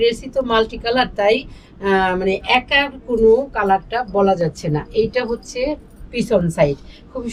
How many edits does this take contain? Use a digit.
0